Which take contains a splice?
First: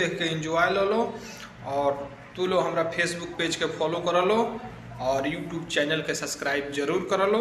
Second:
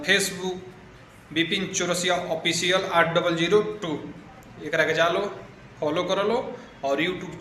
first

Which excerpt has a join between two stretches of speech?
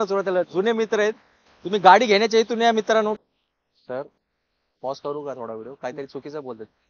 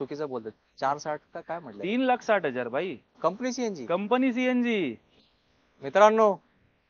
first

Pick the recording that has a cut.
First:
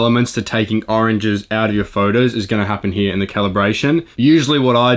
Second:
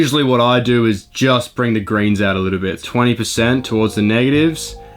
second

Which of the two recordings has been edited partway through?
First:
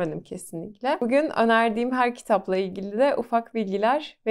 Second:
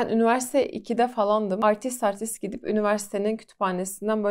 second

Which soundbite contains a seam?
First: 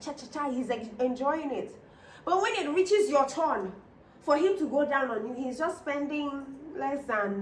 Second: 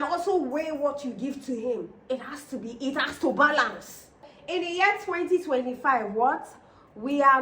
second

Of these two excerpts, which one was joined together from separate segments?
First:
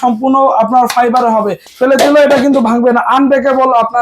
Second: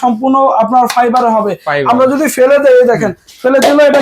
first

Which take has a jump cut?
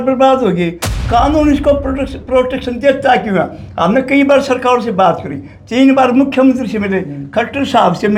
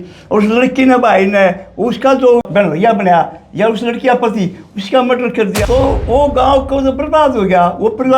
second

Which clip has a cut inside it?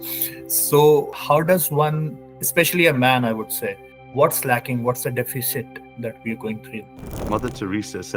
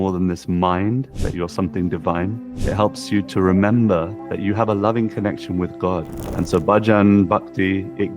second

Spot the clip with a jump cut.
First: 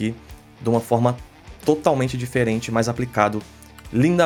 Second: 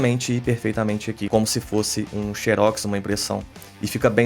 second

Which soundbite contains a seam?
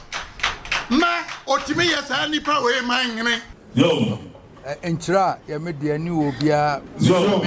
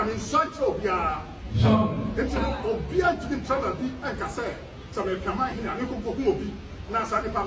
first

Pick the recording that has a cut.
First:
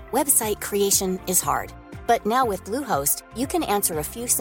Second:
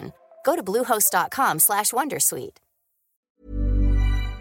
second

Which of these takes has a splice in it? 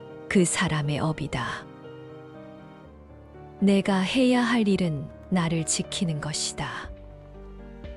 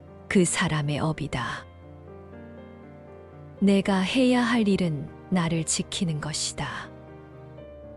second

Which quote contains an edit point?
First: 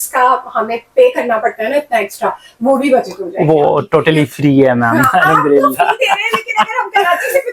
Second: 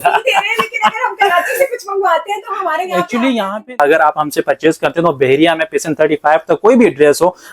second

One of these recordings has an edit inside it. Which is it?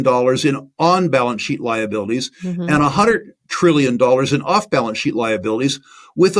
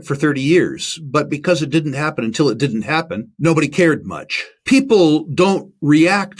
second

